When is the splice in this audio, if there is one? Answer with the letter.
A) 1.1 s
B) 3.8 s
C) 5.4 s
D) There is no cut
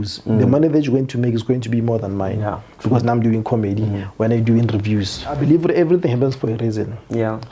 C